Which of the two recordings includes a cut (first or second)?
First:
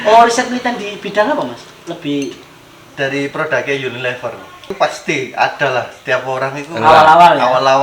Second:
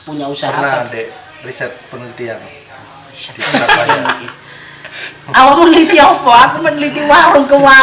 first